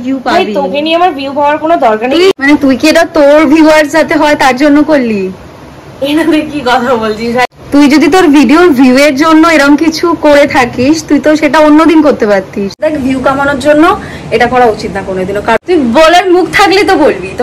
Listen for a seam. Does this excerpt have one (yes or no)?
yes